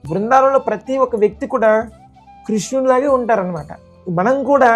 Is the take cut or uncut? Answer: uncut